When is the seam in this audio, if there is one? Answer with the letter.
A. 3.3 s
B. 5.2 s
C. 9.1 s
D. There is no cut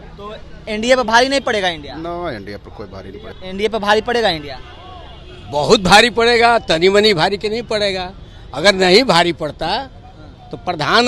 A